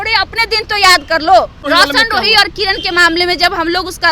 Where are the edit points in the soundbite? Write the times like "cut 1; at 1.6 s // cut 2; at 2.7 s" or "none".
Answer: cut 1; at 1.6 s